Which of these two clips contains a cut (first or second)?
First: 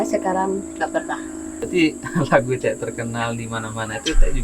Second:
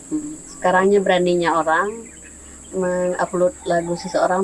first